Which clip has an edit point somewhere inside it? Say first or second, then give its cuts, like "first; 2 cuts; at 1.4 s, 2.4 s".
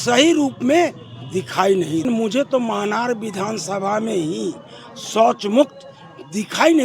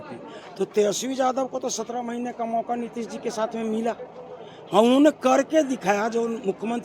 first; 1 cut; at 2.0 s